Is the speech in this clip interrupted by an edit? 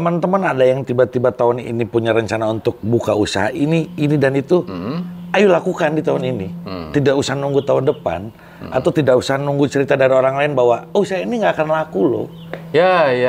no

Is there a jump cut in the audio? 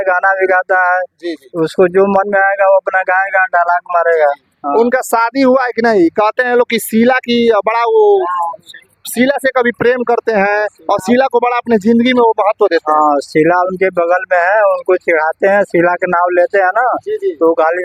no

